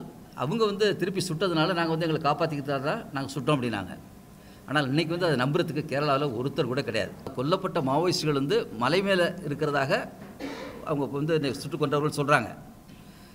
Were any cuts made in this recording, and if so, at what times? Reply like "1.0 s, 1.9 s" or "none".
7.3 s